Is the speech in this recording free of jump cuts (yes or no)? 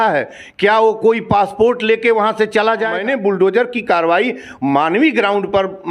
no